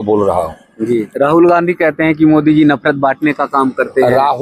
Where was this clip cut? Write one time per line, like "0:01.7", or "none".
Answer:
0:01.1